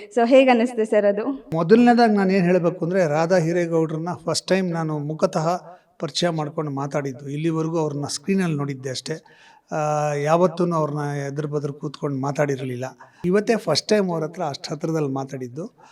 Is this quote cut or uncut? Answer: cut